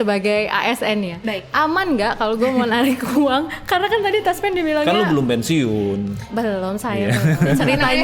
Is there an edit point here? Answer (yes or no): no